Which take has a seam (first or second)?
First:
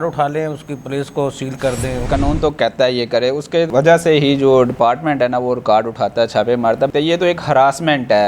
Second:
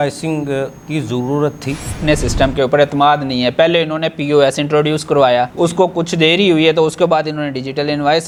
first